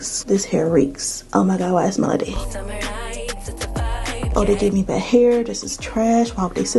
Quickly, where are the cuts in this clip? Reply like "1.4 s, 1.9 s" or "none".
2.3 s, 4.3 s